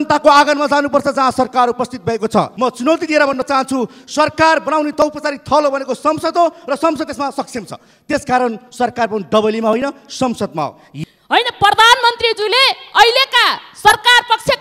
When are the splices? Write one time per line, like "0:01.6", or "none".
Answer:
0:02.5
0:10.9